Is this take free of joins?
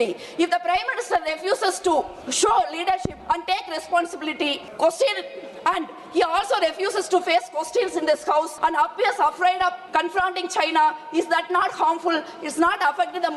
no; 5 cuts; at 2.2 s, 3.1 s, 4.6 s, 8.5 s, 9.8 s

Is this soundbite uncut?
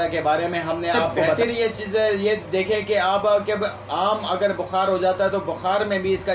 no; 1 cut; at 1.3 s

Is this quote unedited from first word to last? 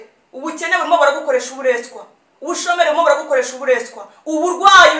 yes; 0 cuts

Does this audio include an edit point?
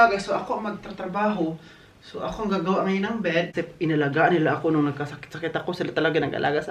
yes; 1 cut; at 3.5 s

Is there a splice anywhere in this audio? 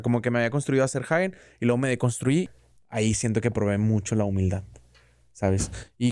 yes; 1 cut; at 2.5 s

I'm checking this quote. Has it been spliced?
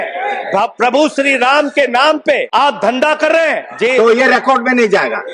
yes; 2 cuts; at 2.5 s, 3.7 s

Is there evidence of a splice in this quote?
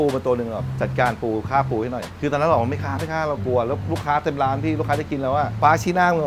no; 0 cuts

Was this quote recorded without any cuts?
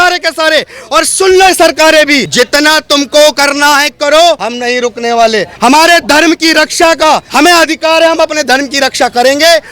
no; 4 cuts; at 2.3 s, 4.5 s, 5.5 s, 7.3 s

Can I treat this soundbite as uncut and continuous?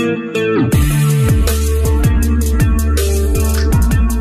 yes; 0 cuts

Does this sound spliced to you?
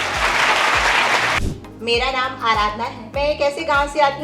yes; 2 cuts; at 1.4 s, 3.0 s

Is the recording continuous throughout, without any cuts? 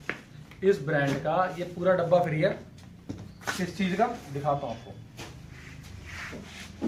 yes; 0 cuts

